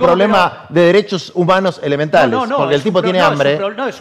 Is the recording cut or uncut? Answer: uncut